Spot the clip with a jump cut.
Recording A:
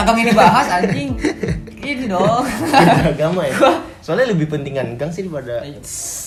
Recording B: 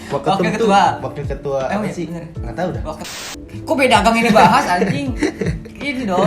B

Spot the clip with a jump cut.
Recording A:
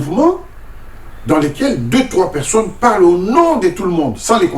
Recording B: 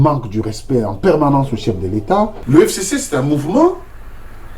B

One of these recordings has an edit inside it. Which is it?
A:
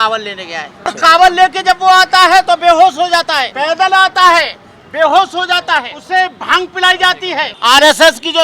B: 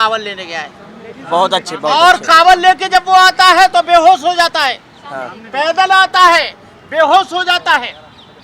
A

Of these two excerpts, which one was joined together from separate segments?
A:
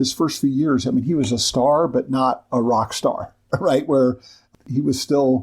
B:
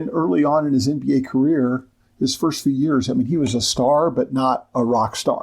A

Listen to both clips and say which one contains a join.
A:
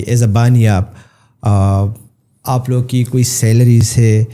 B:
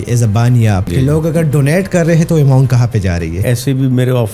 B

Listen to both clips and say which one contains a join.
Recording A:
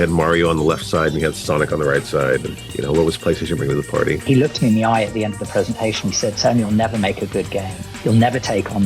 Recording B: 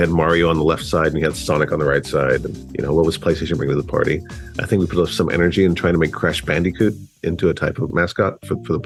A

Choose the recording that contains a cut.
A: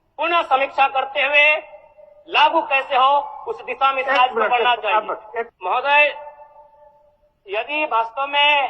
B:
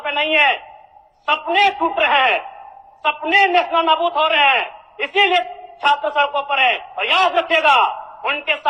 A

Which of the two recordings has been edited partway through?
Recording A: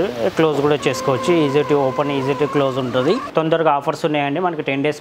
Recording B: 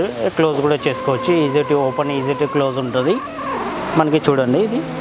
A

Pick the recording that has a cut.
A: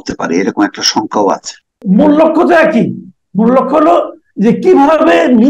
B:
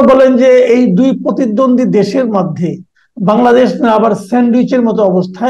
A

